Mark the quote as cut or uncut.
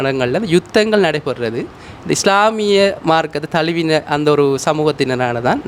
uncut